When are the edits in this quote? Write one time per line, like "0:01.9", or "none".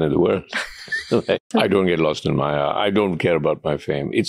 0:01.4